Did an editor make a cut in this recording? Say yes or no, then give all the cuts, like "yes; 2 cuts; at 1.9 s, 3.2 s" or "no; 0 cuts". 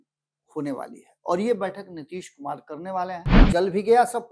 yes; 1 cut; at 3.3 s